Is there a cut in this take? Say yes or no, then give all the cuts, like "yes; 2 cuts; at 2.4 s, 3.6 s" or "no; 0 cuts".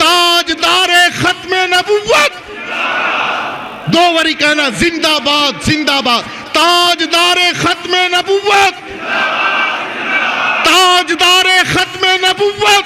no; 0 cuts